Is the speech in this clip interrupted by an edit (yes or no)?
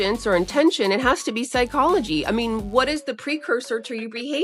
no